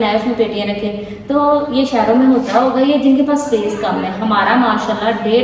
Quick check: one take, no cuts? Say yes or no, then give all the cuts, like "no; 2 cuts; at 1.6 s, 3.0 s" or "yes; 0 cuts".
yes; 0 cuts